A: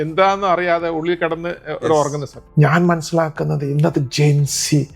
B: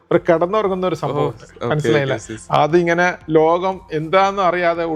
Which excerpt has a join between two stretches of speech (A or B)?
A